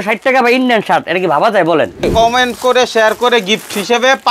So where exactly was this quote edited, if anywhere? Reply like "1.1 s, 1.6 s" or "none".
2.1 s